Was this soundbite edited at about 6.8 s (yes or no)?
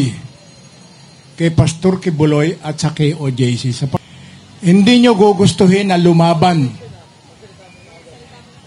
no